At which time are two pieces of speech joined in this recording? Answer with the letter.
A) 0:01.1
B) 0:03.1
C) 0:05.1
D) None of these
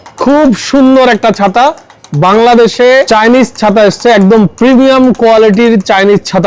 B